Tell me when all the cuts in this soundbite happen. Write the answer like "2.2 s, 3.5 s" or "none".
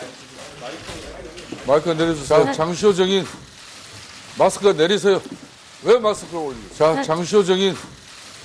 2.0 s